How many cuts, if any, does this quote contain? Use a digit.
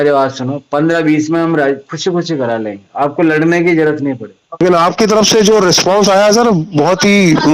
1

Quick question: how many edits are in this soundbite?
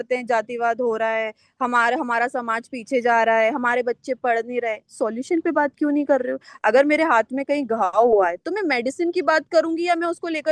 0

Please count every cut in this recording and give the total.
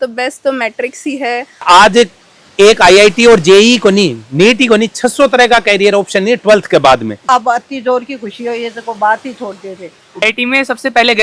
3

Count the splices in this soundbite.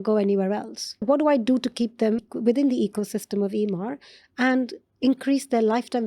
2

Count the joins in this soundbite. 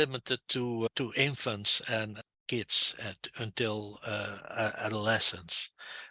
2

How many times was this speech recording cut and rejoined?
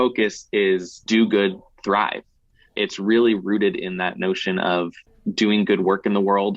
3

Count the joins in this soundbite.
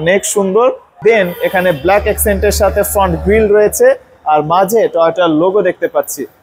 0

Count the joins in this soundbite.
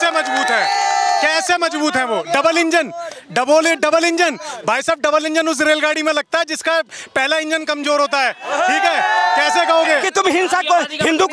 1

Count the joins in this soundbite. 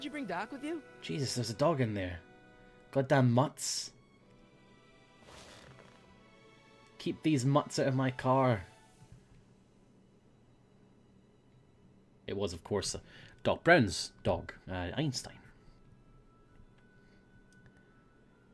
1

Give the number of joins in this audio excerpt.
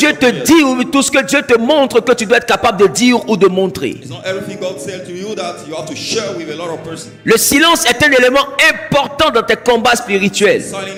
0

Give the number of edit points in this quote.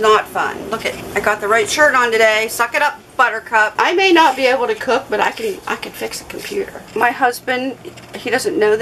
2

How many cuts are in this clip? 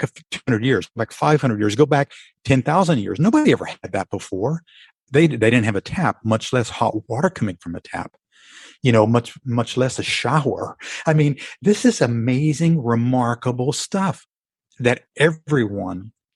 0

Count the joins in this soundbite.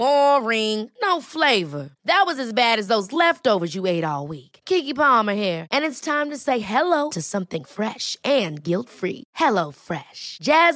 0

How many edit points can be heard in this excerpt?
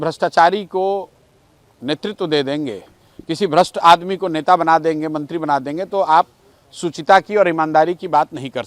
0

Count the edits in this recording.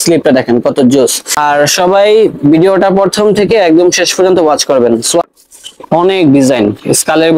2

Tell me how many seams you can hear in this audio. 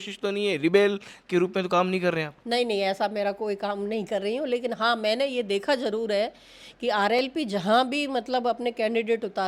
0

